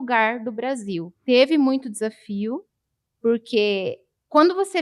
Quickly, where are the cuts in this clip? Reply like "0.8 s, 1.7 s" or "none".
none